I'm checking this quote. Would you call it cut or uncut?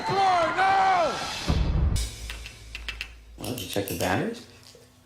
cut